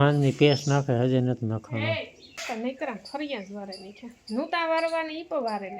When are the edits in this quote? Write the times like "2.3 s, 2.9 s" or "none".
2.4 s